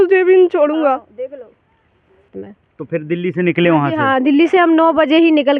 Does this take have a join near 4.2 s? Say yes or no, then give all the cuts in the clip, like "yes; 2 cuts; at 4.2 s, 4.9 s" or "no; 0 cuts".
no; 1 cut; at 2.4 s